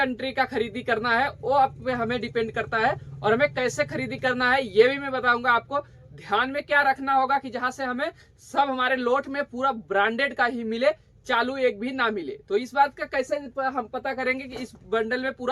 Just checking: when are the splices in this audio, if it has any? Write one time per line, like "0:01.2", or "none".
none